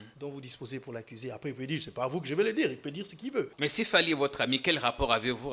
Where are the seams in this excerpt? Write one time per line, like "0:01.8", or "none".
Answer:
0:03.5